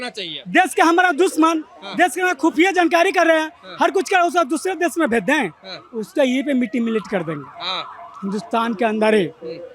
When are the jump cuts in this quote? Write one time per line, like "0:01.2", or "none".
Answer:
none